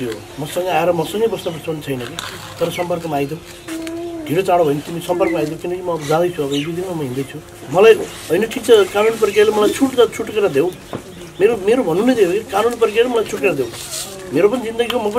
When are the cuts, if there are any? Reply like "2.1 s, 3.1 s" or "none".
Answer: 7.6 s

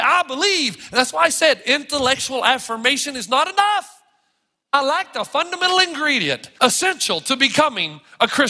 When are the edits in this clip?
4.7 s, 6.5 s

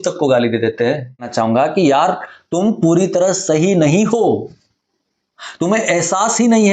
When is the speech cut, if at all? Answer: 1.3 s

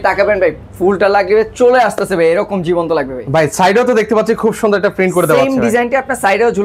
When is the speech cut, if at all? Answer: none

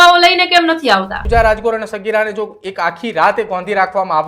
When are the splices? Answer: 1.2 s

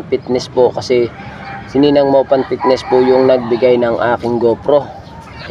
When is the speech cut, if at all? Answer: none

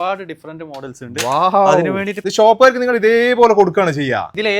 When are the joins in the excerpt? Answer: 2.2 s

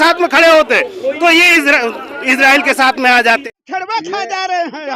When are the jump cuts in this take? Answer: 3.5 s

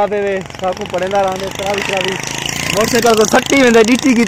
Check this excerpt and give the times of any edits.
none

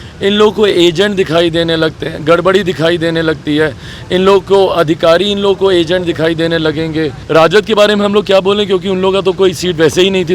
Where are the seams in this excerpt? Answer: 7.2 s

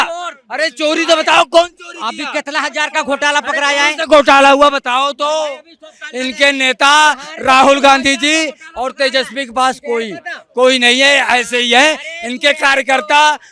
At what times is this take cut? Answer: none

